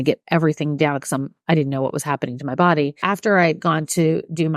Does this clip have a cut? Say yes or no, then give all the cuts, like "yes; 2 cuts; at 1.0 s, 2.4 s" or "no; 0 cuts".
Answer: yes; 1 cut; at 3.0 s